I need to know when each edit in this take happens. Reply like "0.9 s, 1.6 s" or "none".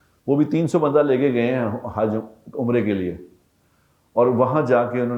none